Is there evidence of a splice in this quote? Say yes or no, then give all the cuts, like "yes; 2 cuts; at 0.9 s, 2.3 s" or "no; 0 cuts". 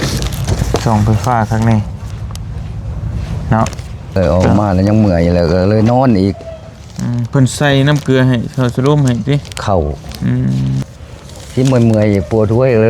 yes; 2 cuts; at 4.2 s, 10.8 s